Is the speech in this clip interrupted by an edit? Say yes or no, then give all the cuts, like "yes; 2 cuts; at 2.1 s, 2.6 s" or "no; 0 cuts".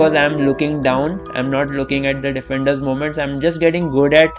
no; 0 cuts